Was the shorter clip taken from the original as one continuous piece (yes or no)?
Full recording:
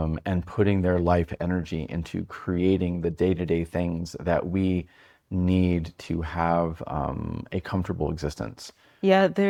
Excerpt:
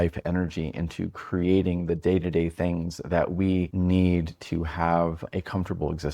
no